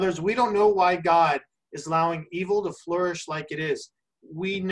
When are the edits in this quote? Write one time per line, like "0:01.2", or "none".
none